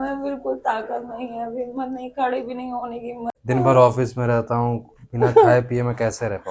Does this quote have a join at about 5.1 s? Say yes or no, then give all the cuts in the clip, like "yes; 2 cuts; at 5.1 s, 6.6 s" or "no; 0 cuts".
no; 1 cut; at 3.3 s